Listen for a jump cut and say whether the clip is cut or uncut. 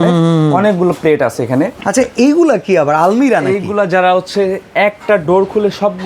cut